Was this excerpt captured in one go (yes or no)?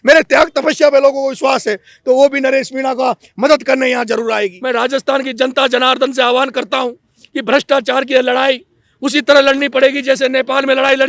no